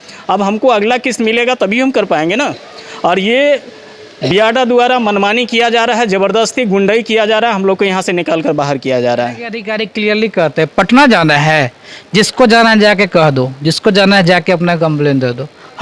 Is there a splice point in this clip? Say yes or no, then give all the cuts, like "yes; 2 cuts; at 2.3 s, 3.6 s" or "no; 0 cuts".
yes; 1 cut; at 9.7 s